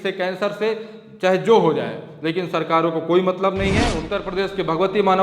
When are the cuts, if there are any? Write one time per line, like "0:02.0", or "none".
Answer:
0:04.0